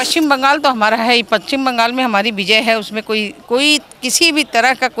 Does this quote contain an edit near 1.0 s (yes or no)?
no